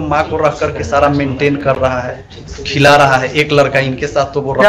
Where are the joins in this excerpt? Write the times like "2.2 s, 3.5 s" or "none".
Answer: none